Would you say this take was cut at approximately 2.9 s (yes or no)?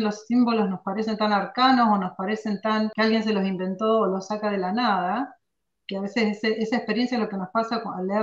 yes